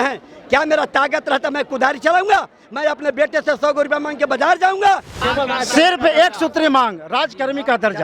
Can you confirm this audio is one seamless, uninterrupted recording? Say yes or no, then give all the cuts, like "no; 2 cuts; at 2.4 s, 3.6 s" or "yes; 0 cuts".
no; 1 cut; at 5.2 s